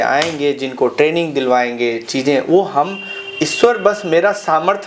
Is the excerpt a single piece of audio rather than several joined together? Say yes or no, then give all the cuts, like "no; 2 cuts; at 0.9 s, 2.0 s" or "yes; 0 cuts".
yes; 0 cuts